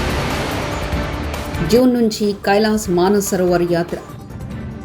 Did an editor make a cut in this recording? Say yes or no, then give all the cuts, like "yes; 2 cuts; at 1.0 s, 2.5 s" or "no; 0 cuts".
yes; 1 cut; at 1.5 s